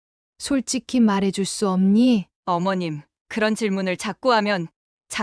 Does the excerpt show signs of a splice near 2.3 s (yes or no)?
yes